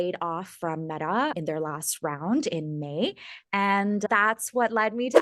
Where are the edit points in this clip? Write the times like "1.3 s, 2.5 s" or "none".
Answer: 1.4 s, 4.0 s